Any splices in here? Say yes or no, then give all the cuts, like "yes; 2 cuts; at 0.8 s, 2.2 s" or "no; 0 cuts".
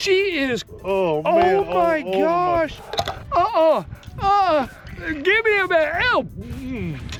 no; 0 cuts